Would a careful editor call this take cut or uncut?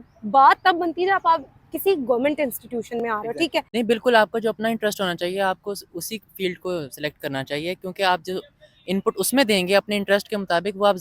cut